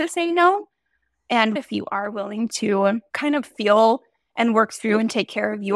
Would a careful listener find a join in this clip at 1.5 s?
yes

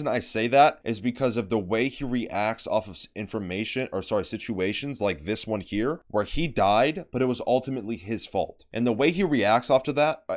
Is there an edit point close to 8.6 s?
yes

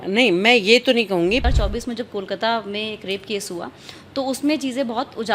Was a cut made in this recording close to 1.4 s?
yes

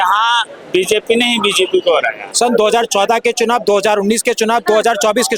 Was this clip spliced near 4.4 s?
no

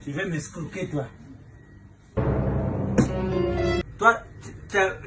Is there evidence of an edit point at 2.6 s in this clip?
no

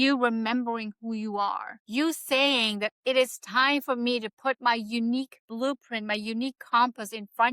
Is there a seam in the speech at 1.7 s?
yes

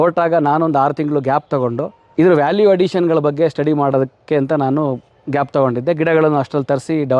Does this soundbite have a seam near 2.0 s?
yes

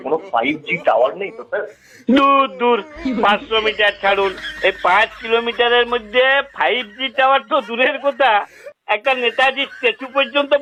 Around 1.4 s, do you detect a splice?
no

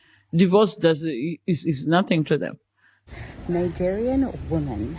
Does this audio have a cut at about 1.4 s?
no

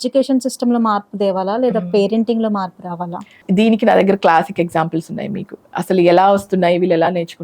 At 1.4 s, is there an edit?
no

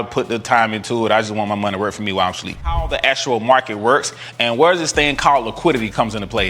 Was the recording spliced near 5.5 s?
no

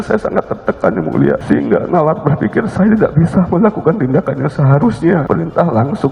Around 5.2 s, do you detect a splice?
yes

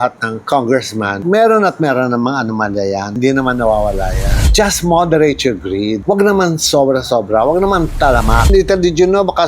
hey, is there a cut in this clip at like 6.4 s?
no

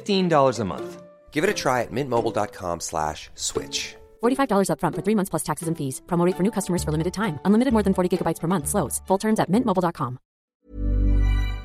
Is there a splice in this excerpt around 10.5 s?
yes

